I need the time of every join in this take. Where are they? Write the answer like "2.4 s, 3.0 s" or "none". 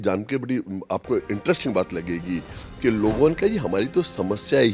none